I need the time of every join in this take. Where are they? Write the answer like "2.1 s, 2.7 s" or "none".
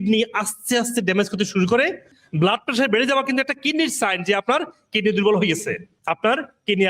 2.1 s, 5.9 s